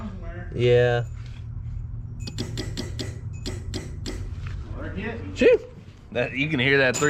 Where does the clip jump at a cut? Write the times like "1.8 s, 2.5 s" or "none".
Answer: none

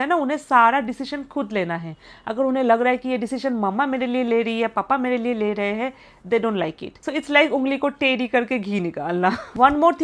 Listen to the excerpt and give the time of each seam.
none

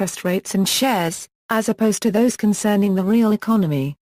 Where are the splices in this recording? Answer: none

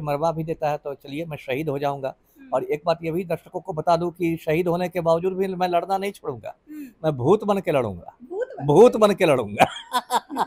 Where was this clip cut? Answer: none

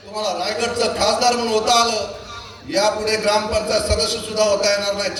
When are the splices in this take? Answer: none

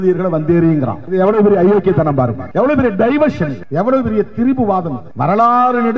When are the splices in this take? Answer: 1.0 s, 2.4 s, 3.6 s, 5.0 s

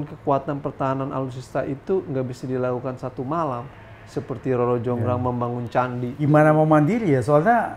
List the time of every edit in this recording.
6.2 s

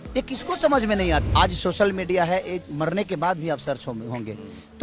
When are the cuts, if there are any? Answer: 1.3 s

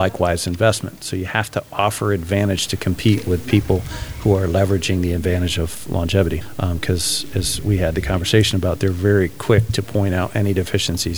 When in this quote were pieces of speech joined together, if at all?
none

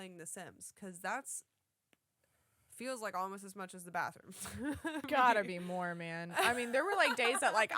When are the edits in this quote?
5.0 s

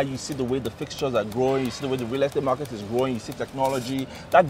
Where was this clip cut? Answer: none

